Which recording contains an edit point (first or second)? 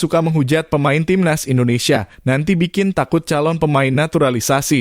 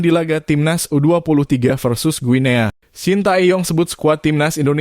second